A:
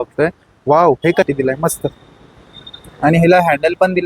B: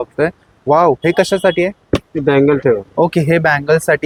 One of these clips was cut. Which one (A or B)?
A